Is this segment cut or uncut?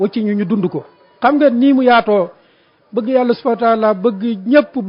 uncut